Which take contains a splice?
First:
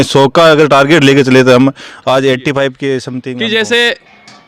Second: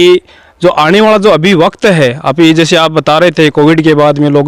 first; 1 cut; at 3.1 s

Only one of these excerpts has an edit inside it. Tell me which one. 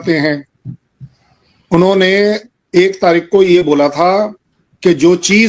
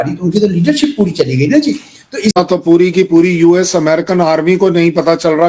second; 1 cut; at 2.4 s

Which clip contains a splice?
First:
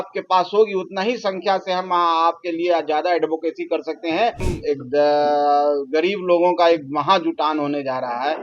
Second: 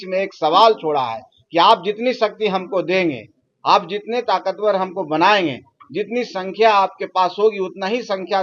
first; 1 cut; at 4.5 s

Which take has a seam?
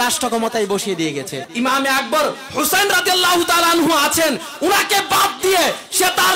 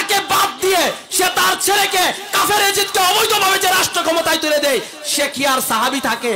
first; 1 cut; at 1.4 s

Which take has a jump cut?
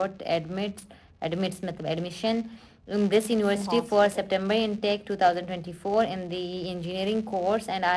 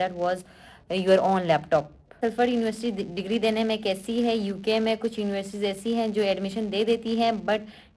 second; 1 cut; at 2.2 s

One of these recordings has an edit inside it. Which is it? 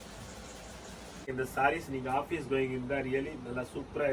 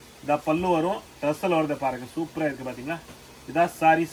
first; 1 cut; at 1.3 s

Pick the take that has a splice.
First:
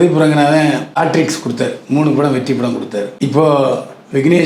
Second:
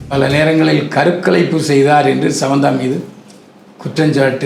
first; 2 cuts; at 0.9 s, 3.1 s

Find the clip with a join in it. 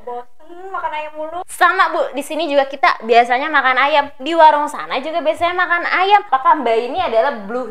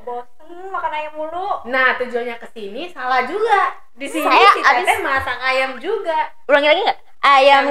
first; 2 cuts; at 1.4 s, 6.3 s

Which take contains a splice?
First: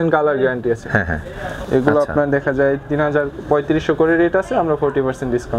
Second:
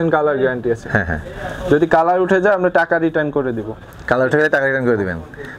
first; 1 cut; at 1.5 s

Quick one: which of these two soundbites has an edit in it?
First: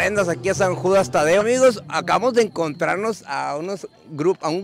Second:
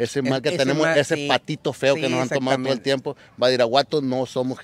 first; 1 cut; at 1.4 s

